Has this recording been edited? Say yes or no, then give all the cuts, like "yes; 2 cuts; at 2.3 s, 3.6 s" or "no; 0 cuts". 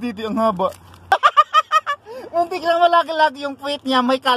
yes; 1 cut; at 1.1 s